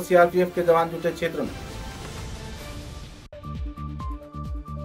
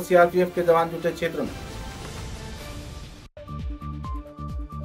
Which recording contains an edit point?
second; 1 cut; at 3.3 s

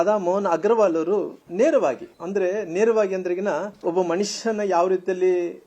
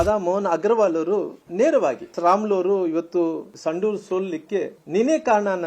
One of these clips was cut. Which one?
second; 2 cuts; at 2.1 s, 3.5 s

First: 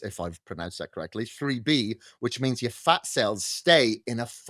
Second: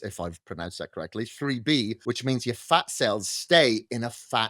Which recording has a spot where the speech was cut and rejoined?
second; 1 cut; at 2.0 s

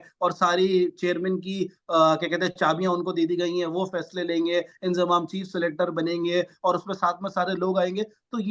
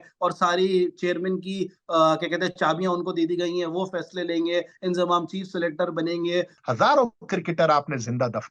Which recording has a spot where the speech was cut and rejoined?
second; 1 cut; at 6.5 s

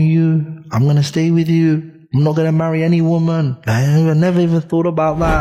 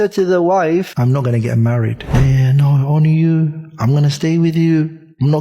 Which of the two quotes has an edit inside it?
second; 2 cuts; at 0.9 s, 2.0 s

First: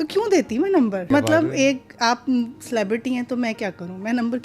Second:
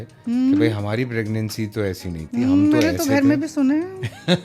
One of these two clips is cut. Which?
first; 1 cut; at 1.0 s

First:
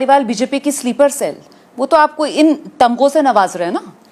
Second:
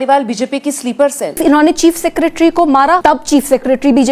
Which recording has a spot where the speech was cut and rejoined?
second; 2 cuts; at 1.4 s, 3.0 s

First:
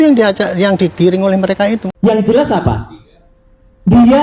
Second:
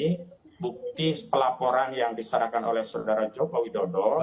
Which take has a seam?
first; 1 cut; at 1.9 s

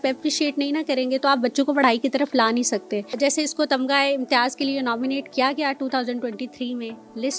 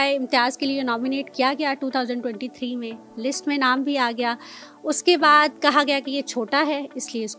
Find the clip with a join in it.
first; 1 cut; at 3.1 s

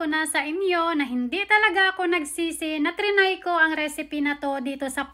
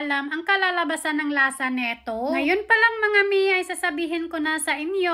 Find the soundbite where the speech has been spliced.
second; 1 cut; at 2.4 s

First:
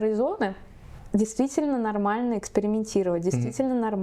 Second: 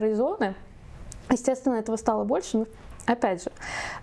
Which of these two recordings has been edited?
first; 1 cut; at 0.9 s

